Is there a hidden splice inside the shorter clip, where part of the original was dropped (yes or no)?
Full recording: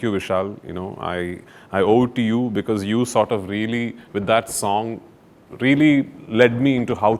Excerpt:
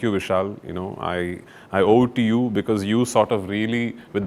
no